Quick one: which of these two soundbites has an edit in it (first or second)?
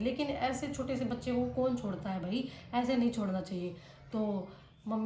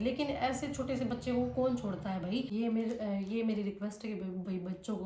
second